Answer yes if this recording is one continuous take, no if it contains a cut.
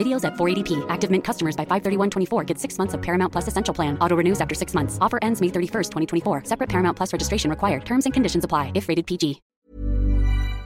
no